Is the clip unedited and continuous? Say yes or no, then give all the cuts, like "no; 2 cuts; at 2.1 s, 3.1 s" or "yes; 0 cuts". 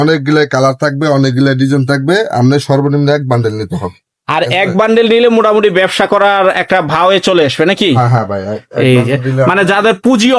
yes; 0 cuts